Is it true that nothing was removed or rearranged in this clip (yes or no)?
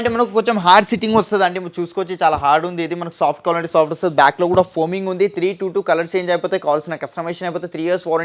yes